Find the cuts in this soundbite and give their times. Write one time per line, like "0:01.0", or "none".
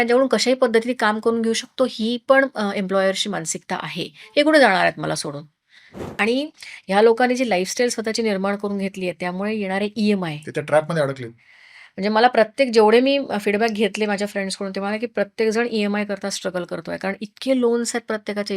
0:06.1